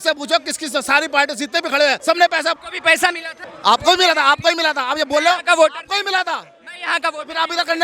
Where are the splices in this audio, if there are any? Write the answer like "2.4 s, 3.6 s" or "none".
2.0 s, 2.7 s